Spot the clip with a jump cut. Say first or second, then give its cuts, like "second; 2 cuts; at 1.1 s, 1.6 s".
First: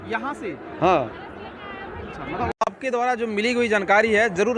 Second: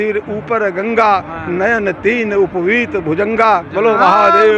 first; 1 cut; at 2.7 s